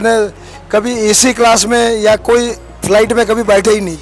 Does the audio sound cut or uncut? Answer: uncut